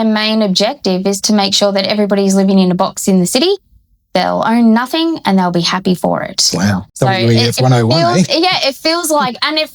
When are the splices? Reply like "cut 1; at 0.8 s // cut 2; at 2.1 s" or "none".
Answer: cut 1; at 6.9 s